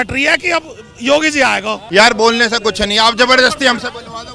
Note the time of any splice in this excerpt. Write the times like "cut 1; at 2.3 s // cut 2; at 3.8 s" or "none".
cut 1; at 1.8 s